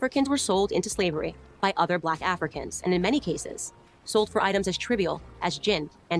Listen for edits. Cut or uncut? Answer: uncut